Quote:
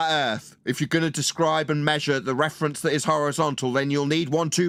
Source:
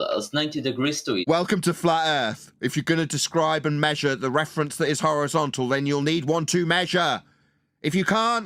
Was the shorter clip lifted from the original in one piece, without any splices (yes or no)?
yes